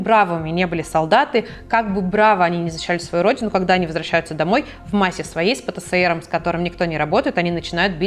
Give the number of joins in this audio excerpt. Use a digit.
0